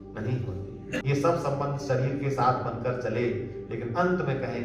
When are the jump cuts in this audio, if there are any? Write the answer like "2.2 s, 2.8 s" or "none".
1.0 s